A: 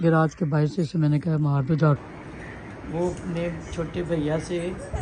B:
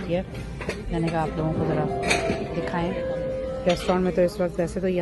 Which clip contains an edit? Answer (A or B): A